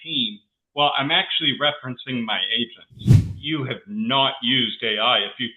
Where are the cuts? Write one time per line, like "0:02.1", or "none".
0:03.3